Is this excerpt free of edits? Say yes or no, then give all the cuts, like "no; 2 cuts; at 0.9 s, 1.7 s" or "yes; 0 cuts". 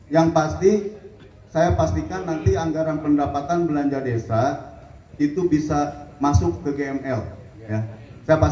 yes; 0 cuts